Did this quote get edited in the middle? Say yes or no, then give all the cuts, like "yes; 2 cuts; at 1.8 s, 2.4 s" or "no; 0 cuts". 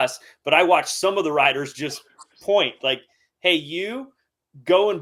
no; 0 cuts